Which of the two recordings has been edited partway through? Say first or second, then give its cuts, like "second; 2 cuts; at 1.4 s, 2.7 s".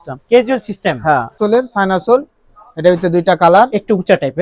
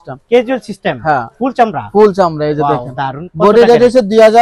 first; 1 cut; at 1.4 s